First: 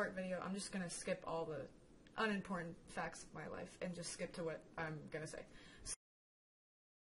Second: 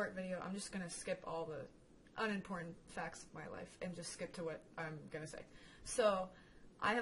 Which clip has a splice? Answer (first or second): second